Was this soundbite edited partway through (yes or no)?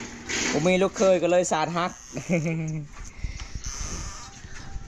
no